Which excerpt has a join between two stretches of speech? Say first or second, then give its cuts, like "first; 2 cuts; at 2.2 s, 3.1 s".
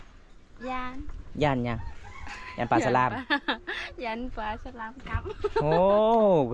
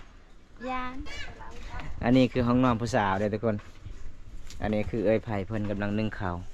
second; 1 cut; at 1.2 s